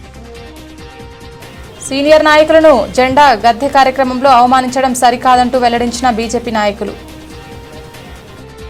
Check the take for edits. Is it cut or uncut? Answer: uncut